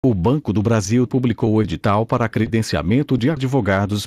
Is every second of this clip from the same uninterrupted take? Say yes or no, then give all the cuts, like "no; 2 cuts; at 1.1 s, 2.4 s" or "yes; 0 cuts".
no; 1 cut; at 0.9 s